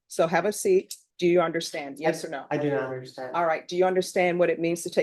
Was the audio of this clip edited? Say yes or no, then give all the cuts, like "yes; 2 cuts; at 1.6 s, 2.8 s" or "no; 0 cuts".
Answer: yes; 1 cut; at 1.0 s